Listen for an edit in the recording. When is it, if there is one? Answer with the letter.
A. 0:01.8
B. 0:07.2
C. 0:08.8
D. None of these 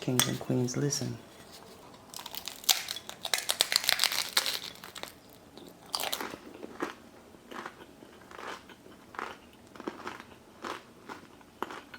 A